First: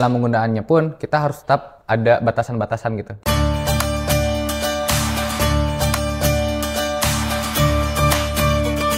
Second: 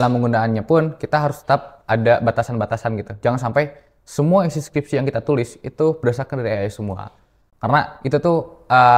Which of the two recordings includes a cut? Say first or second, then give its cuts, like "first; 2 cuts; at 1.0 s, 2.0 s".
first; 3 cuts; at 3.2 s, 5.4 s, 7.5 s